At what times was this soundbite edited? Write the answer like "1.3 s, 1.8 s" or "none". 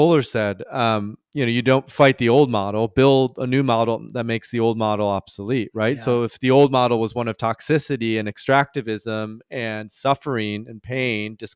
none